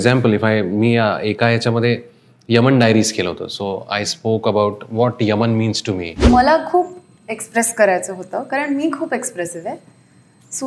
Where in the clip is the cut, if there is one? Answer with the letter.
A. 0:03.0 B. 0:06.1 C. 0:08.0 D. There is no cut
B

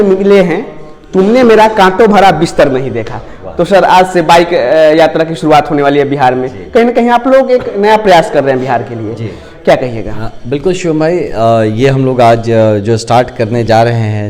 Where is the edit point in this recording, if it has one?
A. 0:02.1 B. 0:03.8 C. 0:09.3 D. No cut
D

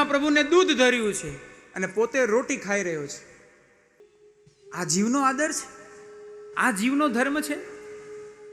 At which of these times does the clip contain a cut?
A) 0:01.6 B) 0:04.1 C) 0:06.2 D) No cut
B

